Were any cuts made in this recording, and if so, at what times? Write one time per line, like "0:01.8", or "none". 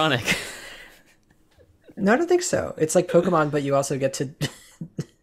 none